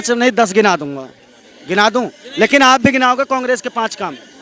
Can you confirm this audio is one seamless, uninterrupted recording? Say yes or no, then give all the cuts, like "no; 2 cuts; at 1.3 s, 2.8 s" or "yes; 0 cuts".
yes; 0 cuts